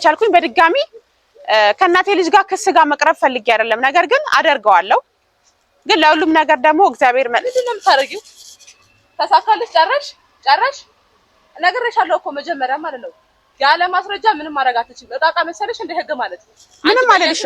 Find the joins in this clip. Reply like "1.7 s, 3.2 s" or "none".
none